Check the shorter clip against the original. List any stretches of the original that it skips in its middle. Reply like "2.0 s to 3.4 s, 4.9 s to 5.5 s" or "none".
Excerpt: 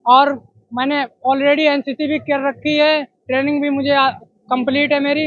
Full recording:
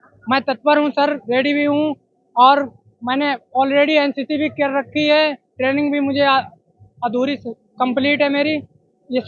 6.6 s to 7.6 s